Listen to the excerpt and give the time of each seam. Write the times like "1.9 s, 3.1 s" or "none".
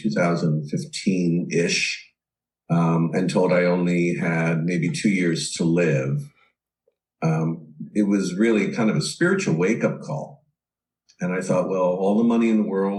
none